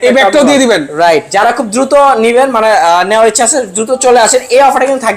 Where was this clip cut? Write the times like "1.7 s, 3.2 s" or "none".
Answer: 1.3 s